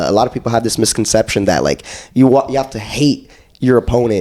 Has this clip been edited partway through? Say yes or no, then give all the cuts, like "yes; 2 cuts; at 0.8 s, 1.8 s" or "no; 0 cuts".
no; 0 cuts